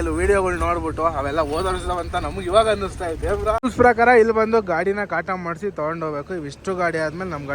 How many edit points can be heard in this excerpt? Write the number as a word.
one